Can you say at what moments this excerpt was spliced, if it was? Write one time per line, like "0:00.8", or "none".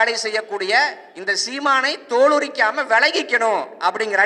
none